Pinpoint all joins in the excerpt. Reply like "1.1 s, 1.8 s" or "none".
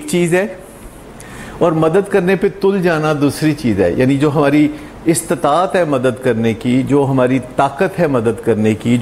none